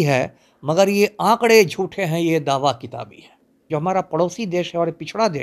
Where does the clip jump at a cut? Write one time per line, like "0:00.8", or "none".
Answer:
0:03.6